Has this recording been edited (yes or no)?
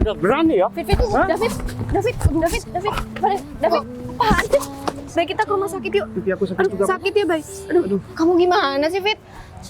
yes